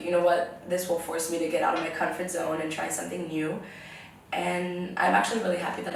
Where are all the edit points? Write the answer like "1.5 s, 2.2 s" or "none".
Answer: none